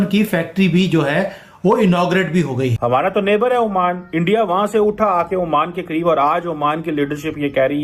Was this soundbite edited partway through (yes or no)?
yes